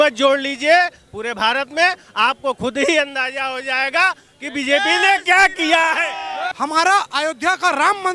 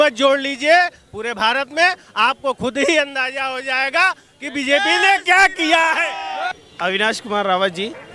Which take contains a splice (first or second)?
first